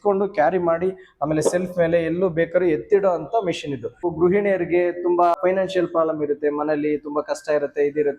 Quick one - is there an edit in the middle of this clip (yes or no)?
yes